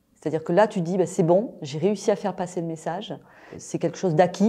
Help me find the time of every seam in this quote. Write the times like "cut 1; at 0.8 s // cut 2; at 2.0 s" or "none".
cut 1; at 3.6 s

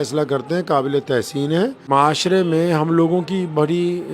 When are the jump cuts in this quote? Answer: cut 1; at 1.8 s

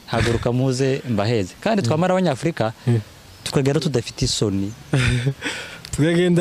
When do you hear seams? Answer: none

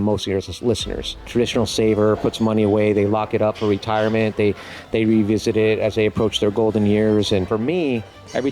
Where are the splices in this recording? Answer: cut 1; at 1.3 s // cut 2; at 7.5 s

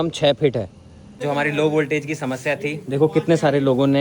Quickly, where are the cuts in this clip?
cut 1; at 1.2 s

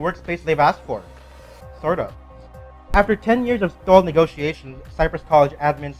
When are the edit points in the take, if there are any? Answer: cut 1; at 4.4 s

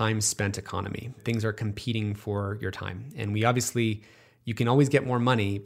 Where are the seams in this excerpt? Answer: cut 1; at 1.2 s

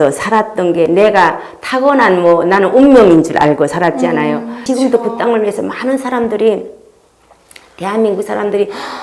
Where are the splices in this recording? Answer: cut 1; at 4.5 s

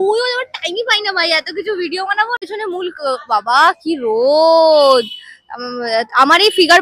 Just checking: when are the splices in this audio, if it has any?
cut 1; at 2.4 s

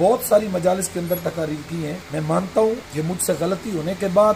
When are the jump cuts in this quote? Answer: cut 1; at 2.0 s // cut 2; at 2.9 s

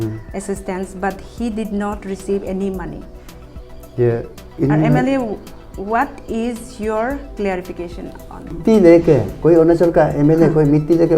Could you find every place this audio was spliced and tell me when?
cut 1; at 8.6 s

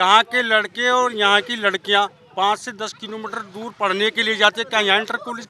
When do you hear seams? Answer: none

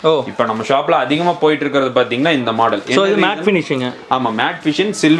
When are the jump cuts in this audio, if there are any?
none

